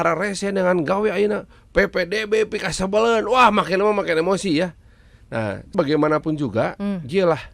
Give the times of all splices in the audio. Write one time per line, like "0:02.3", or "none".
0:05.7